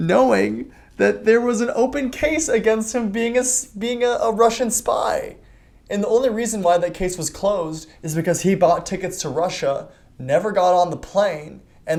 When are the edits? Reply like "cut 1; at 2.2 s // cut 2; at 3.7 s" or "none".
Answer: none